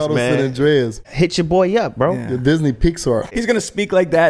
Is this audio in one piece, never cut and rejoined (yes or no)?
no